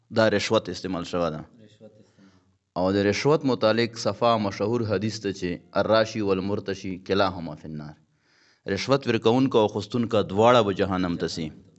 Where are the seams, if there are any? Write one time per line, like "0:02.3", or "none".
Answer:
none